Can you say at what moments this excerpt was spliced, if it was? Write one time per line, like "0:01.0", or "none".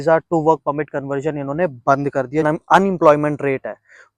0:02.4